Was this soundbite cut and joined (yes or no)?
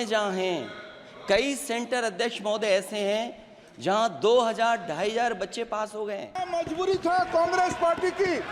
yes